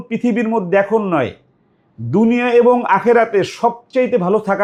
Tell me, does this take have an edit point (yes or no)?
no